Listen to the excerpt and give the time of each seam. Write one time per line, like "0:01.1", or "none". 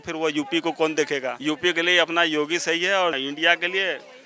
0:01.3
0:03.2